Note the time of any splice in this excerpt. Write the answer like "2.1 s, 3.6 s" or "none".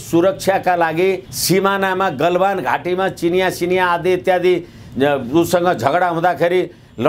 1.3 s